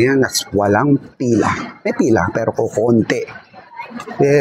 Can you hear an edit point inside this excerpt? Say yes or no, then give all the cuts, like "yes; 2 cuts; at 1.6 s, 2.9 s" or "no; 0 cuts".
no; 0 cuts